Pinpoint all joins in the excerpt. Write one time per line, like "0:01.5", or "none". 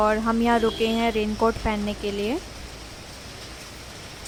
none